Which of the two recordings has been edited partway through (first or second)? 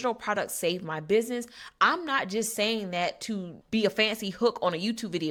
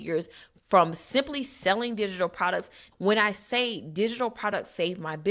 second